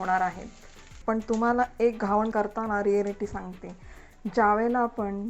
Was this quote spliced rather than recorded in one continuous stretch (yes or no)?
yes